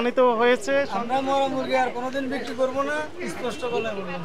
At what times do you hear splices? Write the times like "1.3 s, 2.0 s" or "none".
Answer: 0.9 s